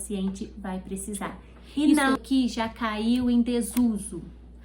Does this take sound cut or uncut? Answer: cut